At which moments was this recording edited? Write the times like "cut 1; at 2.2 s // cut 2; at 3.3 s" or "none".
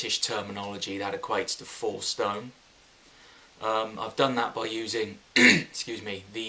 cut 1; at 3.7 s